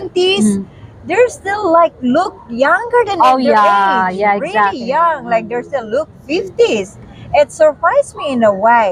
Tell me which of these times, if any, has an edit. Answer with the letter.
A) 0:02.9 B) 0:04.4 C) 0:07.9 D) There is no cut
D